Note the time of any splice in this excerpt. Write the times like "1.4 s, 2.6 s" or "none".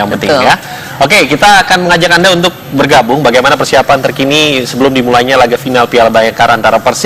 none